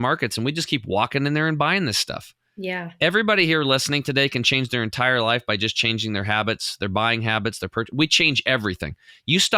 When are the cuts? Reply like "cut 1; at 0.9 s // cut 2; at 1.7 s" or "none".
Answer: none